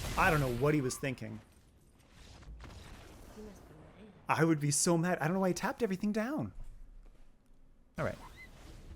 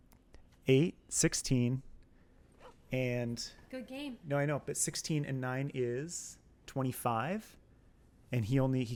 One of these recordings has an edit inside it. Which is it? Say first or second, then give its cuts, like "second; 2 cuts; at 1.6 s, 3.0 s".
first; 1 cut; at 7.9 s